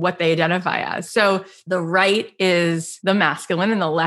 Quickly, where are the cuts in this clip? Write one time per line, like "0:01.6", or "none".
0:01.5
0:02.9